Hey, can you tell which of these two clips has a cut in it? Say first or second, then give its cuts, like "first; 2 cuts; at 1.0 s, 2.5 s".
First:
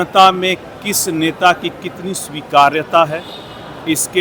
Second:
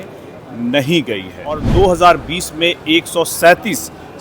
second; 1 cut; at 1.6 s